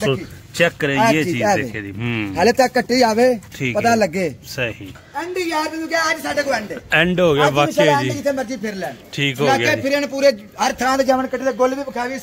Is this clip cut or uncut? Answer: cut